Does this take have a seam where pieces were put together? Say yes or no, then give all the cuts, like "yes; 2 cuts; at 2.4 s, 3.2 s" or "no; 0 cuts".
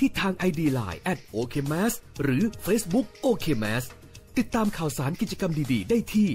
no; 0 cuts